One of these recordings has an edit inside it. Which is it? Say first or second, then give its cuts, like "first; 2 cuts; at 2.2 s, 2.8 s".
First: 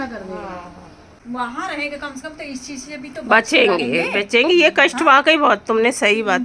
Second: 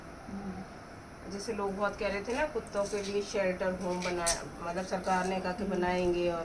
first; 1 cut; at 1.1 s